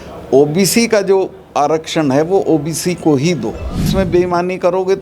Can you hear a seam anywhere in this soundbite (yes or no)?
yes